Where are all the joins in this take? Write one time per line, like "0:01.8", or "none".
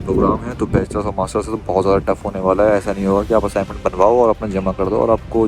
none